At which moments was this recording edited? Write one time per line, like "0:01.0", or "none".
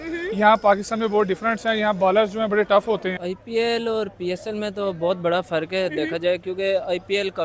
0:03.3